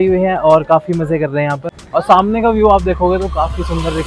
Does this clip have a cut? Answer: yes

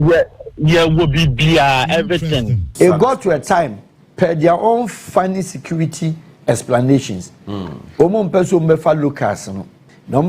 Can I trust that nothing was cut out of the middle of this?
no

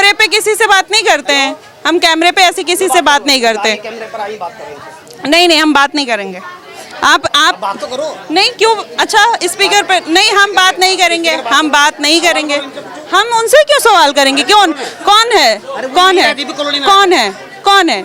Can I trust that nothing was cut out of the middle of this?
yes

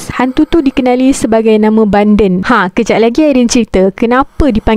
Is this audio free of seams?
yes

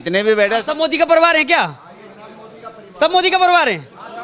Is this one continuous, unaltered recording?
yes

